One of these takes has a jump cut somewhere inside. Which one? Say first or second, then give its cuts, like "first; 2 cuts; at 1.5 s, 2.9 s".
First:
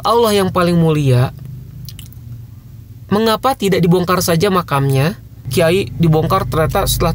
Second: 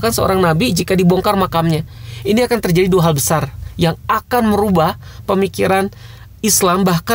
first; 1 cut; at 5.5 s